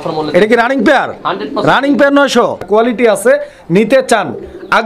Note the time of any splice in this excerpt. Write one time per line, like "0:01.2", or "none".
0:02.4